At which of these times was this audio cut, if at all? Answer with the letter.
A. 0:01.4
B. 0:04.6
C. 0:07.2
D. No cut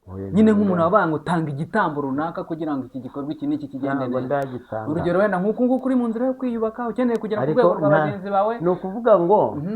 D